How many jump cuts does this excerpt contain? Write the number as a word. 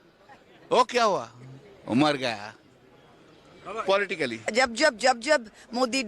zero